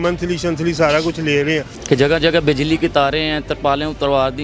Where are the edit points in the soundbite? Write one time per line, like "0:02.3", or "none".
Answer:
0:01.7